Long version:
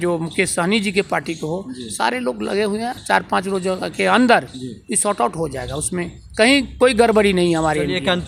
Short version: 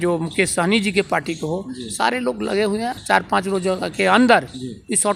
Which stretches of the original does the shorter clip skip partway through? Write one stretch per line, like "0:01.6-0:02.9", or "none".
none